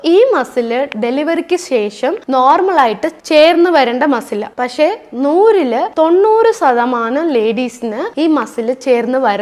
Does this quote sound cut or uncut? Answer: uncut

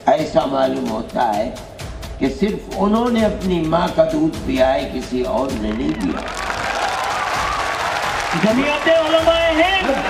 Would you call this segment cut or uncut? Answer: uncut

